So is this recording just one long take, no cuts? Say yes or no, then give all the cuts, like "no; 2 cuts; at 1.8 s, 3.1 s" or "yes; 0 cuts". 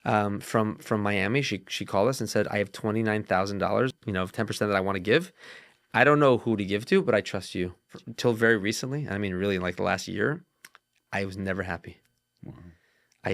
no; 2 cuts; at 3.9 s, 7.9 s